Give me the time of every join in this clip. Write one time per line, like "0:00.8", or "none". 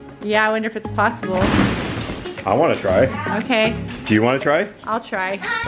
0:02.3